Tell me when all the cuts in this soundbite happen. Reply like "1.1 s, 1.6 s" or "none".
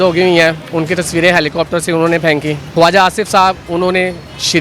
2.6 s